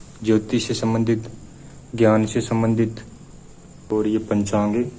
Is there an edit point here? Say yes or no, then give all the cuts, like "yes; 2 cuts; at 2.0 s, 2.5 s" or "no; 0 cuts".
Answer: yes; 1 cut; at 3.9 s